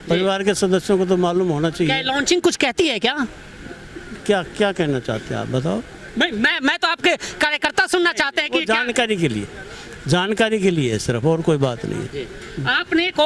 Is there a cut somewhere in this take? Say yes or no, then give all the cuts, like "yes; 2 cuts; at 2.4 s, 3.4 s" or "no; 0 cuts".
no; 0 cuts